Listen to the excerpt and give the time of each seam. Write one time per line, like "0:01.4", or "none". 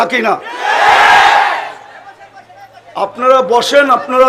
none